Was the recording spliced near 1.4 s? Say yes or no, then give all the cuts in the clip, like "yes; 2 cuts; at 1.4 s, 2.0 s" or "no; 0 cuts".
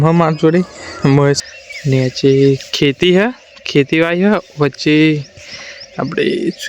yes; 1 cut; at 1.4 s